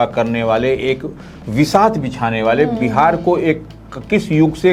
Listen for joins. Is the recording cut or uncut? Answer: uncut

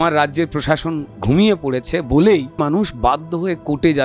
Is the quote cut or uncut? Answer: cut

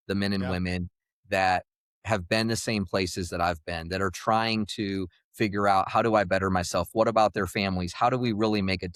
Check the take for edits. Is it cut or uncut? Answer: uncut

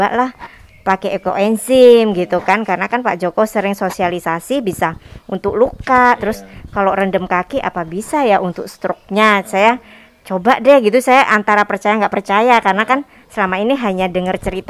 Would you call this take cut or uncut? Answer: uncut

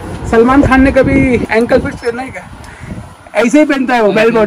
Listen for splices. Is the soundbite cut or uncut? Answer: cut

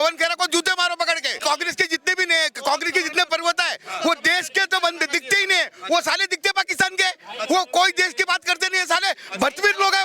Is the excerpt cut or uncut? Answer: cut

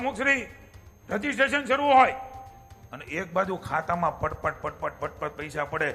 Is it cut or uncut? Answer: uncut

